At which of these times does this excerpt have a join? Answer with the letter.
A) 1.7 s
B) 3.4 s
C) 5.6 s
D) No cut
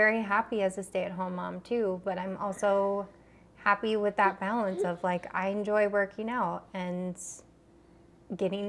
D